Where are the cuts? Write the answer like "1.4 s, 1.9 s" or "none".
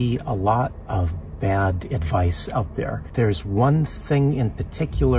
3.1 s